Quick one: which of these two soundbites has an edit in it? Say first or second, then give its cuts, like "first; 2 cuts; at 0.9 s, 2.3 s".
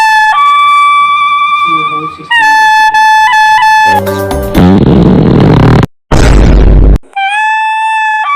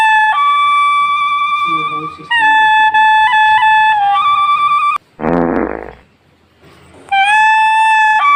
first; 1 cut; at 4.0 s